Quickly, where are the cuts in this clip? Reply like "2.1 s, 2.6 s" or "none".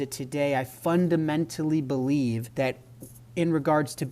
2.5 s

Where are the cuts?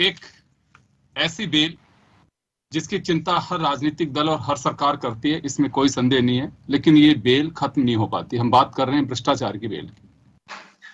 none

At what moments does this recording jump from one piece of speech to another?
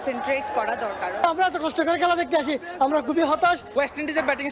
1.2 s, 3.7 s

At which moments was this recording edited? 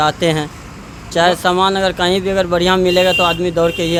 none

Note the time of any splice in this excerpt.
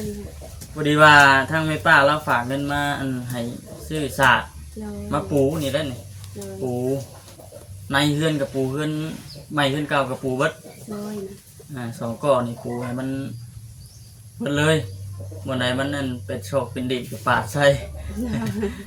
none

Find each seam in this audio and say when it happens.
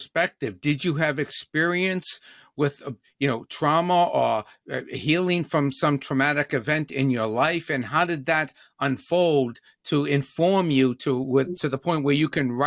none

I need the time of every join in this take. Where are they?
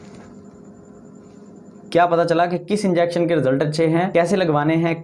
4.1 s

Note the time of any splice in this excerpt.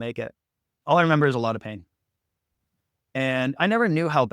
0.8 s, 2.5 s

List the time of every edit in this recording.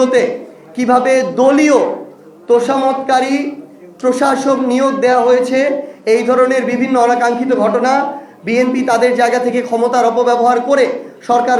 none

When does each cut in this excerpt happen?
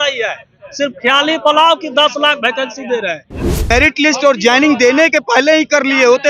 3.7 s

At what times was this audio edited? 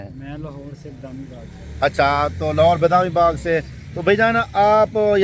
none

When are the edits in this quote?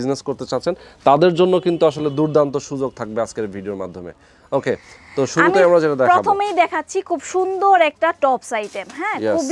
none

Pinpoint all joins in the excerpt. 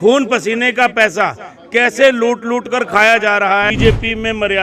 3.7 s

